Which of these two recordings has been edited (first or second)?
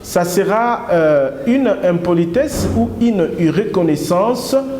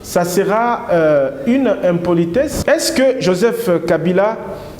second